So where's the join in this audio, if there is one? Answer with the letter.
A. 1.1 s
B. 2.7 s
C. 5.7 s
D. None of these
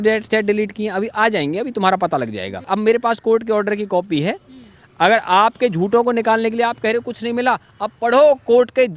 B